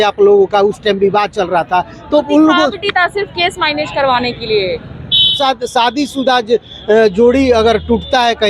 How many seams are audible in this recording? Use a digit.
1